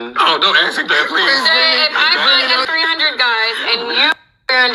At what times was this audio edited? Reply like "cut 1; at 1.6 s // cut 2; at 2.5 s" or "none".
cut 1; at 2.7 s